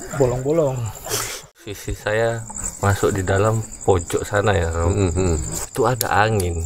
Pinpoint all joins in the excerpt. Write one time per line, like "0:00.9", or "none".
0:01.6